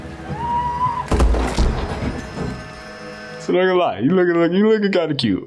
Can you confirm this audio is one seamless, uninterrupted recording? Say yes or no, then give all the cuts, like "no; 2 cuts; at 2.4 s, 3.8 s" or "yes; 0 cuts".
no; 1 cut; at 3.4 s